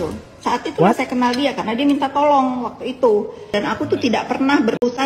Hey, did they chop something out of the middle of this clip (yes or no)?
yes